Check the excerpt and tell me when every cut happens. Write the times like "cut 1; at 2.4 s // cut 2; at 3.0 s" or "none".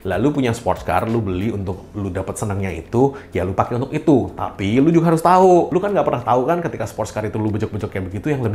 none